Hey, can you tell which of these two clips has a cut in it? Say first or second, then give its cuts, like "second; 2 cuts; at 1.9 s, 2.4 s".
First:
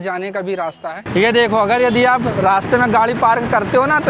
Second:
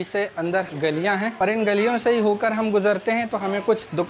first; 1 cut; at 1.1 s